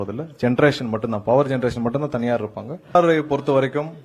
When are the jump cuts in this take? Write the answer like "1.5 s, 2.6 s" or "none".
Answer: 3.0 s

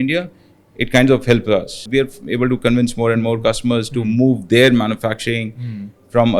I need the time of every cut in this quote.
1.8 s

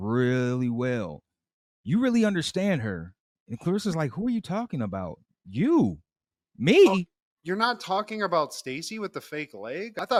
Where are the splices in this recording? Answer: none

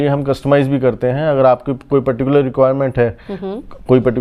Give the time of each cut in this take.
none

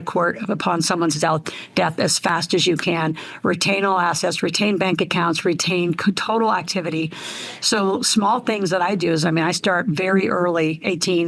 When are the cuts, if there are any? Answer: none

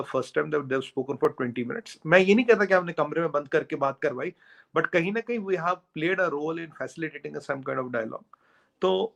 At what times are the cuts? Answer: none

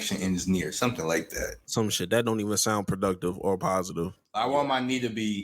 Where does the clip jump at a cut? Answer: 4.1 s

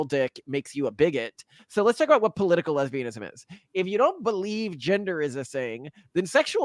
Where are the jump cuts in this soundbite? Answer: 1.6 s

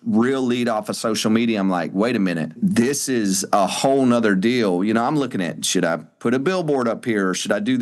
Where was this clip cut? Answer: 2.5 s

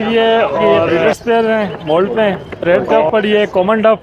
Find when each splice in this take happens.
1.1 s, 2.6 s

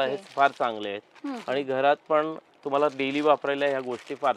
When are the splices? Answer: none

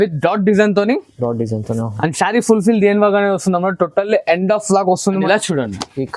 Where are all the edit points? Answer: 5.2 s

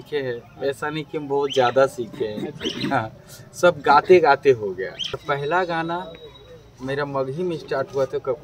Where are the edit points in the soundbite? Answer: 5.2 s

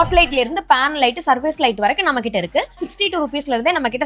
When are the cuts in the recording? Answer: 2.7 s

